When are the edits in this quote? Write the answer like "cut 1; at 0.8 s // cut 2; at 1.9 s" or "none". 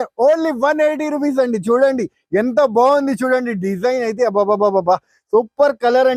none